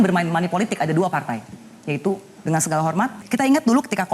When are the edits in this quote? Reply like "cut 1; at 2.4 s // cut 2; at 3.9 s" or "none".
cut 1; at 3.2 s